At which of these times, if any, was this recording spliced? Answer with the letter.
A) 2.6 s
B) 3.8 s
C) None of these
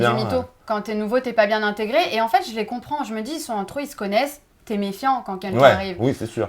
C